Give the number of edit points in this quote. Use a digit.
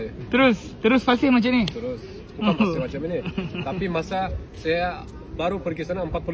0